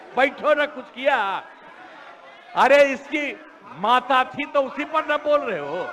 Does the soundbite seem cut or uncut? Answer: uncut